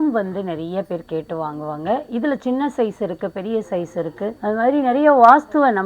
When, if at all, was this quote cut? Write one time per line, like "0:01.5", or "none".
none